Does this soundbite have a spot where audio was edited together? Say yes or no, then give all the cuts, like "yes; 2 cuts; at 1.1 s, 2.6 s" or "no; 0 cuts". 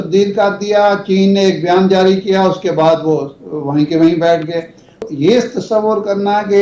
yes; 1 cut; at 5.1 s